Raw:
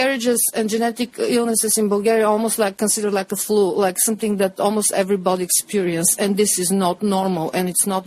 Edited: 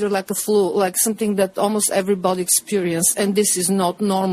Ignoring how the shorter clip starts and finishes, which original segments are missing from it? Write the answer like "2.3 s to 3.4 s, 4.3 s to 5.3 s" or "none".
none